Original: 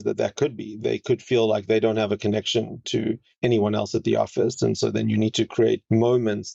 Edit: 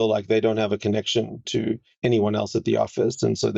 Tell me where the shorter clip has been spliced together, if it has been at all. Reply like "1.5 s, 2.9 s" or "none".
none